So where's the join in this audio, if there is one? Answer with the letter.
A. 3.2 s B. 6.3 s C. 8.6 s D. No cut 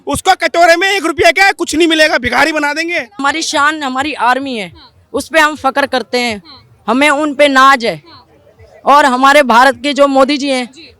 A